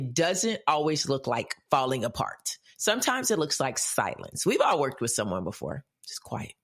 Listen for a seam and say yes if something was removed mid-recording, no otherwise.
no